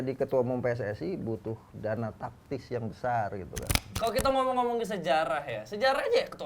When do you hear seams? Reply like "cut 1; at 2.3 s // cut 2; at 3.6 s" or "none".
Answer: cut 1; at 3.9 s